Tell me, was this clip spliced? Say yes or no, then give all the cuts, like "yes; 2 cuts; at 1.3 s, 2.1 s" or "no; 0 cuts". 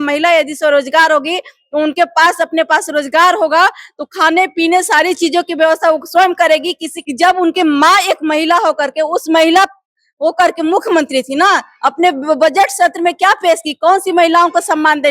yes; 1 cut; at 6.9 s